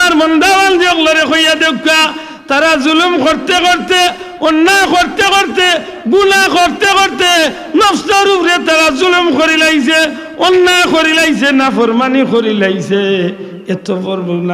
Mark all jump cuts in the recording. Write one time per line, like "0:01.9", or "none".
none